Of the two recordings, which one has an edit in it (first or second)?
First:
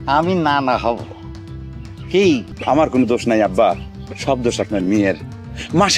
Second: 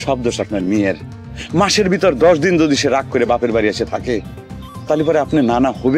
first